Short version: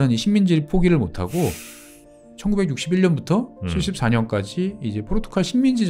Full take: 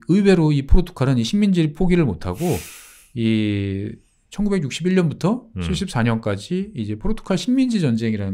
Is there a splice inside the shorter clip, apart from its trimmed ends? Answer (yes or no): yes